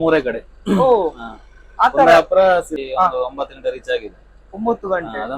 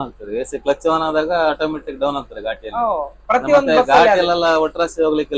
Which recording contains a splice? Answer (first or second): first